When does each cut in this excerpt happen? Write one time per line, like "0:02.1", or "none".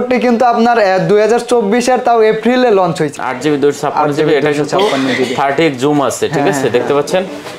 0:03.1

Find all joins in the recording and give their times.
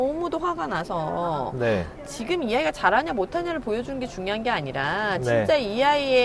none

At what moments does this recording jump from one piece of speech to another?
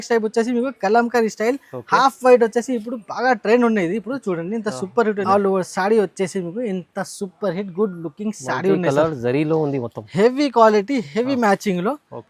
0:05.2

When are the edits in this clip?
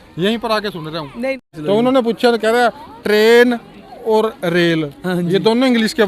0:01.5

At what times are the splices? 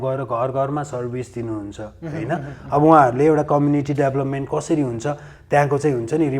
none

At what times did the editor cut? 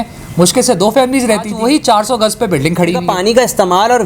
0:01.3
0:03.3

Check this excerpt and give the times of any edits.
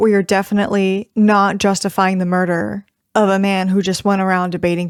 none

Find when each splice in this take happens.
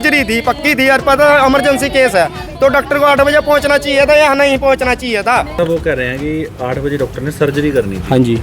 0:05.6

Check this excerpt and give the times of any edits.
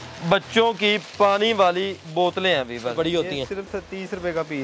0:02.9

